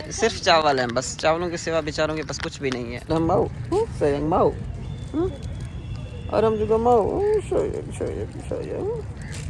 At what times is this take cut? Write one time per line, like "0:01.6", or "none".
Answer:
0:03.0